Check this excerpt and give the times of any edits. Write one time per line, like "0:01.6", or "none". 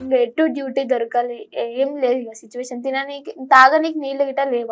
none